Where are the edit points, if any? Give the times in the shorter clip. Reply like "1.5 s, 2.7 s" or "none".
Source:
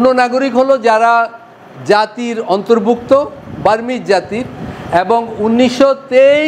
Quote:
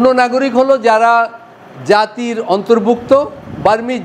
none